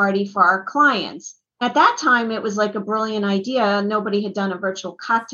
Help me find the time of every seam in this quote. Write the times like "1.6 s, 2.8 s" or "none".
1.6 s